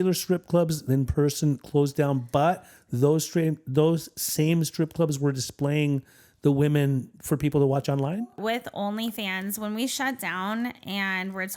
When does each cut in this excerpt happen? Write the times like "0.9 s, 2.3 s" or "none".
8.4 s